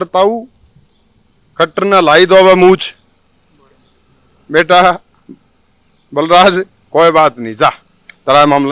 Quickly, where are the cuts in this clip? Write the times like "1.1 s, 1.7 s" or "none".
none